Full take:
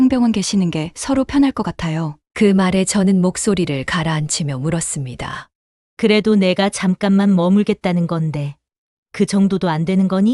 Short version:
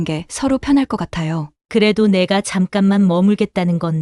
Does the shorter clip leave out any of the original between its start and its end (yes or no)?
yes